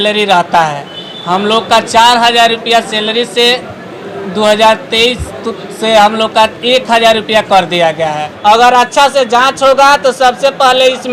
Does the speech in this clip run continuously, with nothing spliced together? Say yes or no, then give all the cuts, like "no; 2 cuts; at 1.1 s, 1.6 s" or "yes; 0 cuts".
no; 1 cut; at 8.3 s